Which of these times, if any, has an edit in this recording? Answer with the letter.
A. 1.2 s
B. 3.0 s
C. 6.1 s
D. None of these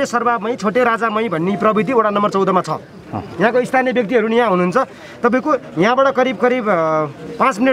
D